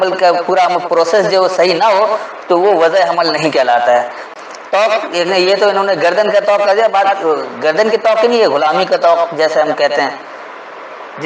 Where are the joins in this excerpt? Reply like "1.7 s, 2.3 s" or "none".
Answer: 4.2 s